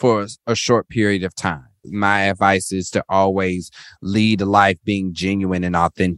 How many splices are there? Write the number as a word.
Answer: one